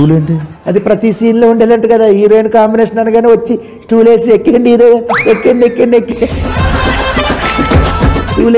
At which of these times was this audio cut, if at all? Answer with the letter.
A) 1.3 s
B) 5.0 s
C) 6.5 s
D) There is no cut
C